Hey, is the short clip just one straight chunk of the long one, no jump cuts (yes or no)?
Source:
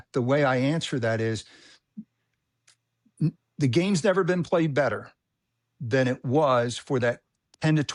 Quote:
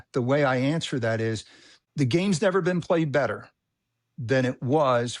no